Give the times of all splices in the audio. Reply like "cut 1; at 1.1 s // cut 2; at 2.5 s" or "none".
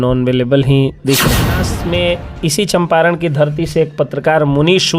cut 1; at 1.7 s